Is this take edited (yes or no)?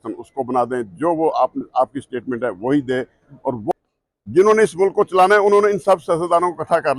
yes